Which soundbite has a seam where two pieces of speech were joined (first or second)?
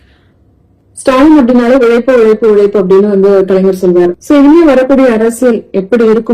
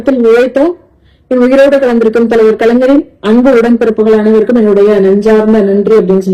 first